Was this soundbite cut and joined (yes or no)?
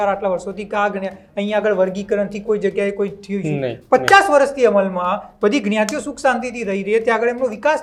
no